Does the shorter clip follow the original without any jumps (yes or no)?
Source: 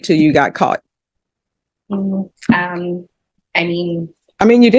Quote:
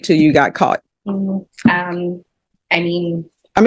no